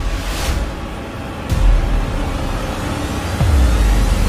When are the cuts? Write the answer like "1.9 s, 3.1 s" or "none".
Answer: none